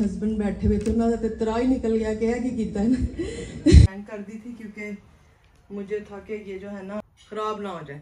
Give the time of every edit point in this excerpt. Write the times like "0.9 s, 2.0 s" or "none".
3.9 s, 7.0 s